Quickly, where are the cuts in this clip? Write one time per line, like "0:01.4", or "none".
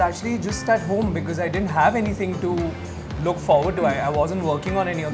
none